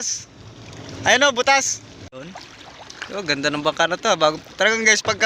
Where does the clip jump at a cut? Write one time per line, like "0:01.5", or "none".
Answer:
0:02.1